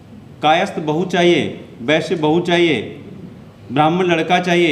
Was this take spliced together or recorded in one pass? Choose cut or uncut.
uncut